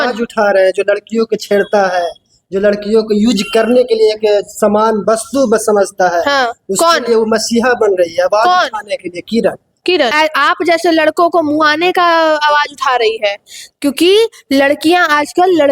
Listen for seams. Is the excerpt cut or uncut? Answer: cut